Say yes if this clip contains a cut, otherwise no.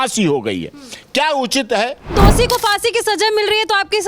yes